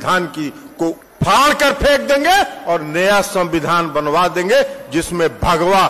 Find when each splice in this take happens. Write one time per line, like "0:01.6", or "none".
0:01.1